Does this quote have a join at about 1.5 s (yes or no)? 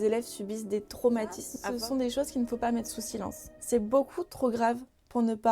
yes